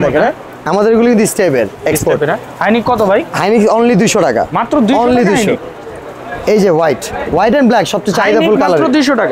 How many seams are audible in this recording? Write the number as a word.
zero